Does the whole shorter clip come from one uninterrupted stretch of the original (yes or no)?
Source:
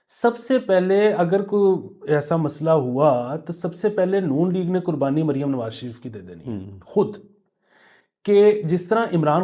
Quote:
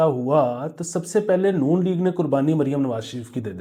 yes